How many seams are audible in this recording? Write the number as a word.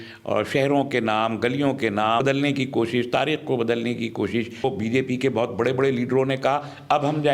two